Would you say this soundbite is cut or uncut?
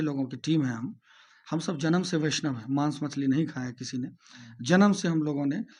uncut